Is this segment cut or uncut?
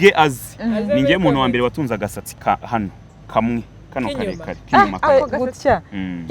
cut